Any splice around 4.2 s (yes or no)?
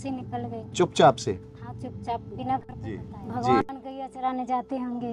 yes